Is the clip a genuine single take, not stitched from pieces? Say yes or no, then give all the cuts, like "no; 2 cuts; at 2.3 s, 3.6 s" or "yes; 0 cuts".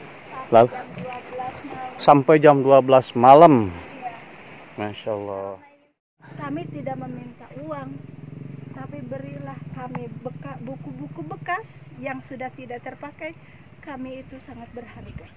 no; 1 cut; at 6.3 s